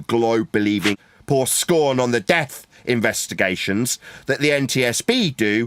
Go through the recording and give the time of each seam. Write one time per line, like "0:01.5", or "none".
0:01.1